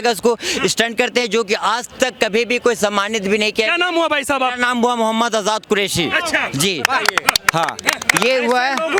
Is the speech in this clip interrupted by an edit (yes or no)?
no